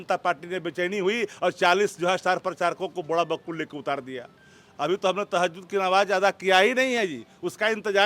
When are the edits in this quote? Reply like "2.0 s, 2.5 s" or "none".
none